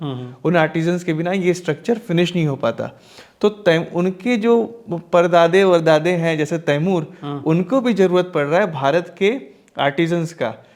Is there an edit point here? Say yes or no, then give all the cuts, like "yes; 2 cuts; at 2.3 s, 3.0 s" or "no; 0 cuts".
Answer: no; 0 cuts